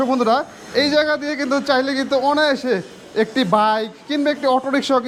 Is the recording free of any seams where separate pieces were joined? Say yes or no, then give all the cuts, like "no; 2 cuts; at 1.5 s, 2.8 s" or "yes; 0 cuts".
yes; 0 cuts